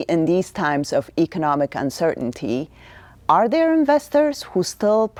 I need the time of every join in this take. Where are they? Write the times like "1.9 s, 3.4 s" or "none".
none